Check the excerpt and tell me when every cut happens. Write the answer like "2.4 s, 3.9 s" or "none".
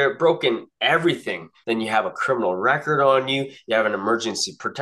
1.5 s